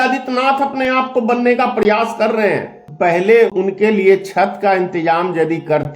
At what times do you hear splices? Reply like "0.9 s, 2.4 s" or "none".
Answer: 2.8 s, 3.6 s